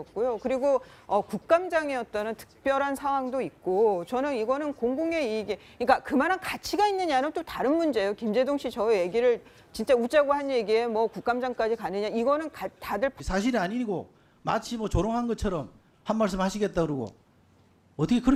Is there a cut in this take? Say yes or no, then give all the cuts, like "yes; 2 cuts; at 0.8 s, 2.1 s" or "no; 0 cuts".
no; 0 cuts